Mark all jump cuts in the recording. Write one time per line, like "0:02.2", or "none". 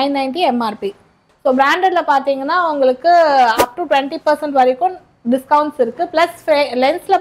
0:01.2